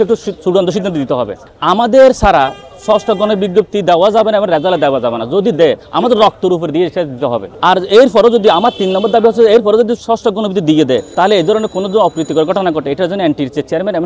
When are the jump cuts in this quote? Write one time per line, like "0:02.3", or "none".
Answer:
0:01.4
0:07.5
0:11.1